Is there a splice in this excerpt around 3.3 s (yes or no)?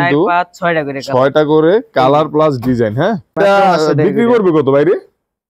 yes